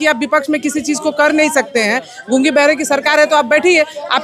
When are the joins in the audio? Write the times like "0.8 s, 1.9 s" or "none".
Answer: none